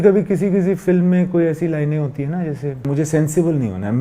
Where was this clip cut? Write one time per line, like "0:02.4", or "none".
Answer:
0:02.9